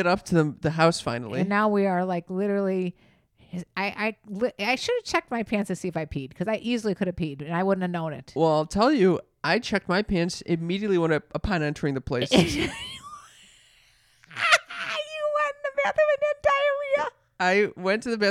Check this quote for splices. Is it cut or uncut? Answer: uncut